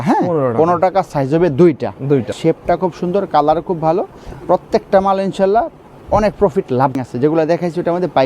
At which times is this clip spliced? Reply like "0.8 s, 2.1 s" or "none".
2.3 s, 6.9 s